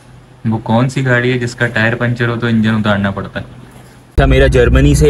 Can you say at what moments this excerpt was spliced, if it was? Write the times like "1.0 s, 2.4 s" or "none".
4.0 s